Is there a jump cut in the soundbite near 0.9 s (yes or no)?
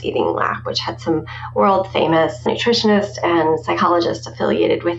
no